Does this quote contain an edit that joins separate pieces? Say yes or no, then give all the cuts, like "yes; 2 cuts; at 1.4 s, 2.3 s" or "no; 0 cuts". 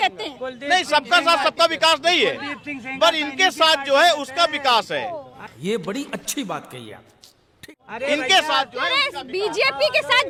no; 0 cuts